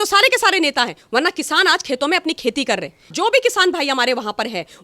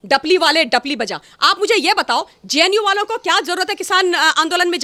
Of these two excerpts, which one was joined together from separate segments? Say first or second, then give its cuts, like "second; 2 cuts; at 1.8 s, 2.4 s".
first; 1 cut; at 3.1 s